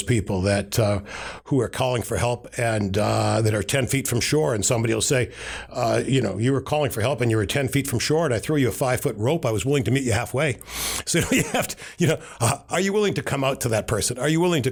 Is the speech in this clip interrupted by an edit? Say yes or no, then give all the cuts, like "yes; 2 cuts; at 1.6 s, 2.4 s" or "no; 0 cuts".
no; 0 cuts